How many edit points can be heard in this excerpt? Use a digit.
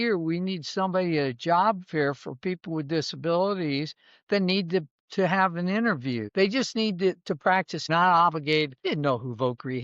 3